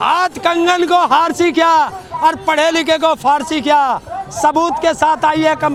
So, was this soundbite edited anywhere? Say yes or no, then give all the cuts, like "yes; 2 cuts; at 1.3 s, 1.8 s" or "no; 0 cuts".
no; 0 cuts